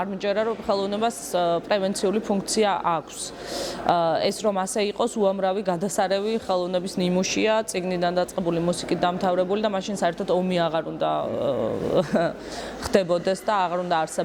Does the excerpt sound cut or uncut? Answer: uncut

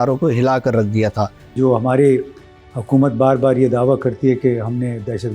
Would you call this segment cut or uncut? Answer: cut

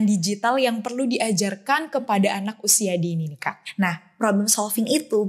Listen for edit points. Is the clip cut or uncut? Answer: cut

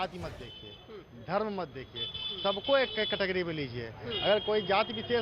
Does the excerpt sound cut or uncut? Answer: uncut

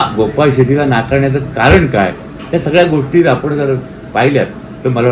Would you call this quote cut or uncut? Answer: uncut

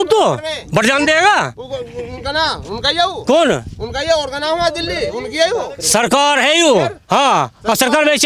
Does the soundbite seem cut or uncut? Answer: uncut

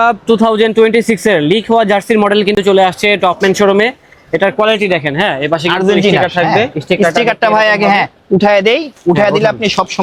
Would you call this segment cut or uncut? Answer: uncut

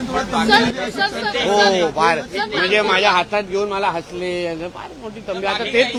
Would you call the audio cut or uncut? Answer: uncut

